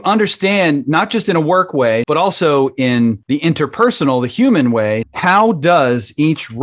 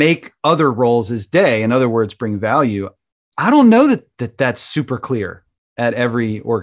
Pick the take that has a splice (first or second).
first